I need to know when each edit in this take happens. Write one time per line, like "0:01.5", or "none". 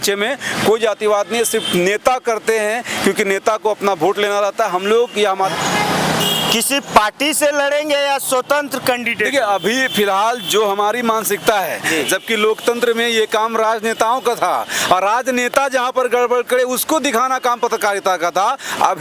0:05.5
0:12.0